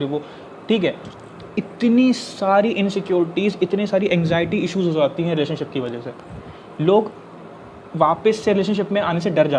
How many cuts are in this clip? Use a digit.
1